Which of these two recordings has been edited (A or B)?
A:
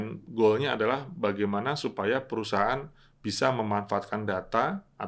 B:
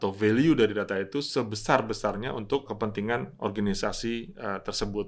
B